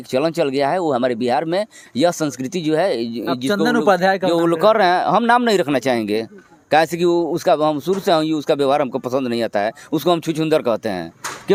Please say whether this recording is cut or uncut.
uncut